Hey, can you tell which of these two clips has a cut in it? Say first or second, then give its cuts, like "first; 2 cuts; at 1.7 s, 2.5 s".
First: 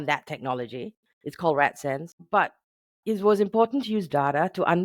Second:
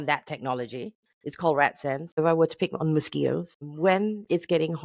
second; 2 cuts; at 2.2 s, 3.6 s